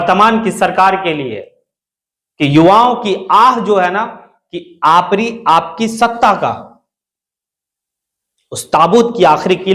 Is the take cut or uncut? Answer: uncut